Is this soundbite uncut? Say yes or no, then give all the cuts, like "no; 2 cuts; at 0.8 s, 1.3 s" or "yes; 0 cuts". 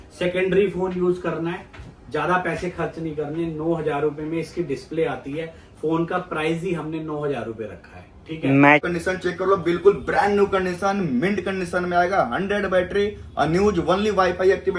no; 1 cut; at 8.8 s